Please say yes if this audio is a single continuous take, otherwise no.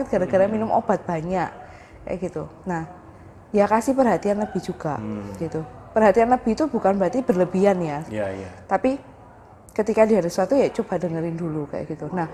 yes